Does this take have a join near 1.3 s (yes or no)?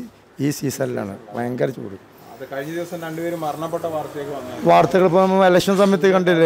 no